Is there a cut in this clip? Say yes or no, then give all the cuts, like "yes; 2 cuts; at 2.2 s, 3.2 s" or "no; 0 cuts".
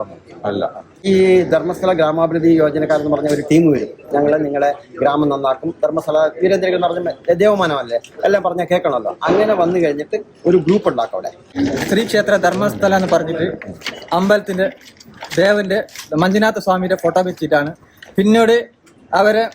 yes; 2 cuts; at 0.9 s, 11.5 s